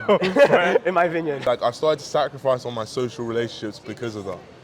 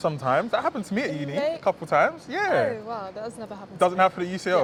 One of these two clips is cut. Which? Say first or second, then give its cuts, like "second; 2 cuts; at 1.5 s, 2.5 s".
first; 1 cut; at 1.4 s